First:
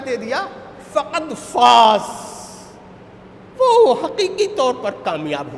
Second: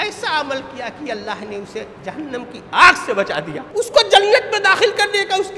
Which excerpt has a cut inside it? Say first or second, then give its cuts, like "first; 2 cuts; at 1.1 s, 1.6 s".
second; 2 cuts; at 1.9 s, 3.6 s